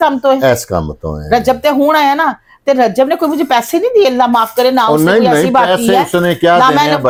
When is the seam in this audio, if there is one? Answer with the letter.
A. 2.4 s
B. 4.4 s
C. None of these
C